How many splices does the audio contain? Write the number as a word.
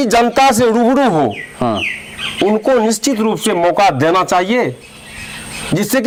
zero